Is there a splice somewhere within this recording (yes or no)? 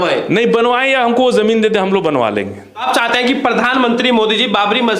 yes